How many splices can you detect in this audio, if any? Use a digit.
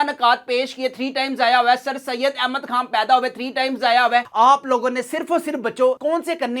1